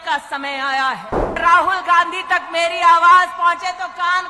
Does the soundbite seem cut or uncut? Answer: cut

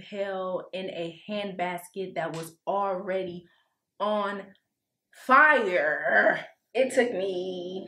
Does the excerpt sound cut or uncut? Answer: cut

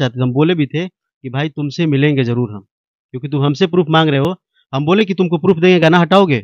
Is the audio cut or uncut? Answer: uncut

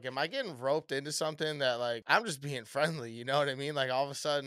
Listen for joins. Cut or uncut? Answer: cut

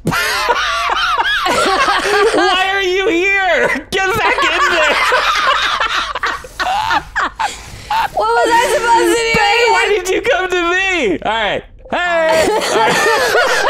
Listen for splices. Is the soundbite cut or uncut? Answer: uncut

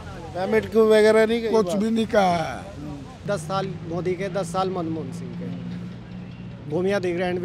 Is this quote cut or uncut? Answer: cut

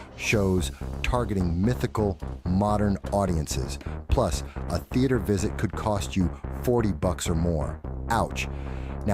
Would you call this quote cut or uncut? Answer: uncut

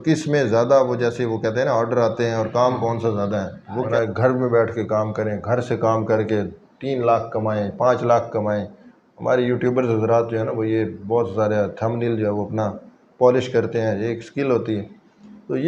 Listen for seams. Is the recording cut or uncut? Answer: cut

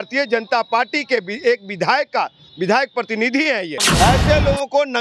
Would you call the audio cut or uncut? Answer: cut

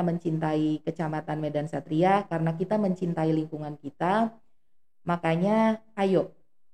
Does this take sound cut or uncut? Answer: uncut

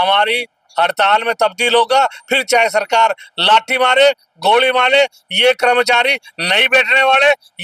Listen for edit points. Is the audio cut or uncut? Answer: uncut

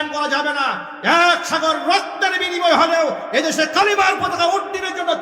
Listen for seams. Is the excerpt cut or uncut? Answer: uncut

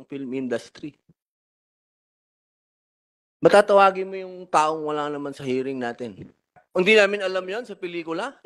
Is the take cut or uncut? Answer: cut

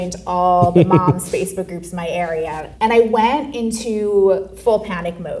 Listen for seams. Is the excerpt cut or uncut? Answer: cut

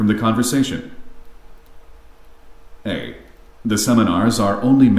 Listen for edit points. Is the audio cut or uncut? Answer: uncut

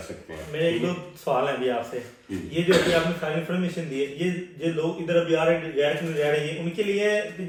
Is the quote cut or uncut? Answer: uncut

